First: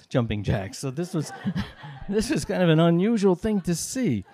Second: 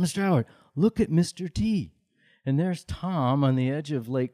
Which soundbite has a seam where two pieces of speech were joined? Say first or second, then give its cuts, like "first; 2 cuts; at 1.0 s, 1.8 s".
second; 1 cut; at 2.3 s